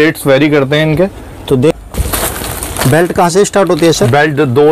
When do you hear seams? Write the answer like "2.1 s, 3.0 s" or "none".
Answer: 1.7 s